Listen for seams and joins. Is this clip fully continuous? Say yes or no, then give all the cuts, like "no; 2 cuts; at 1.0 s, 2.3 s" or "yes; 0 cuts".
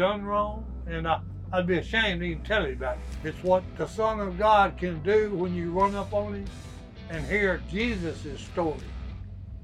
no; 1 cut; at 3.1 s